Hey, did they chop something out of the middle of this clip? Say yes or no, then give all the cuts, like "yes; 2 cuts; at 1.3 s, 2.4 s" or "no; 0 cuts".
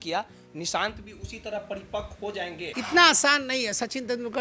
yes; 1 cut; at 2.7 s